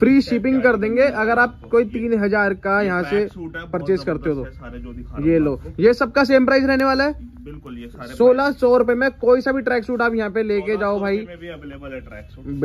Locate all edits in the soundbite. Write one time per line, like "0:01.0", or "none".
none